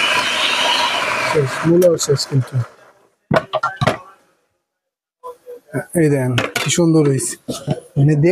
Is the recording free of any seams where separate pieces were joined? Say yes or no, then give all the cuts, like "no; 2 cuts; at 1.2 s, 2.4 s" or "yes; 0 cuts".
yes; 0 cuts